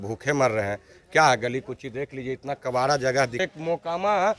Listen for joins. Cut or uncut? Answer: cut